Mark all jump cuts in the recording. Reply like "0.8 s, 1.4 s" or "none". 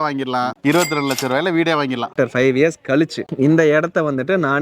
2.1 s